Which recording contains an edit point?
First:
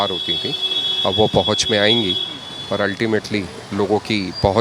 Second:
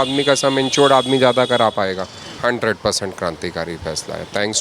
second; 1 cut; at 2.3 s

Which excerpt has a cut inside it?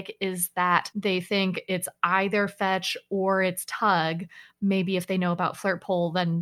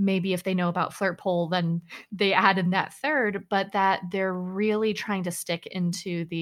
first; 1 cut; at 0.9 s

